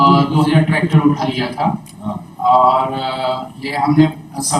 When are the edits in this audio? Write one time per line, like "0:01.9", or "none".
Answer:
none